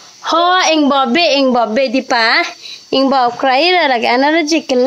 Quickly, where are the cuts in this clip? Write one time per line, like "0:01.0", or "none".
none